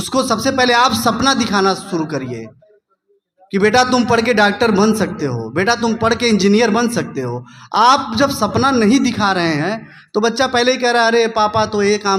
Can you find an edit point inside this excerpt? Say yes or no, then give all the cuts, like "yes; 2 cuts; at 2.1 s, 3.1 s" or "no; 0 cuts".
no; 0 cuts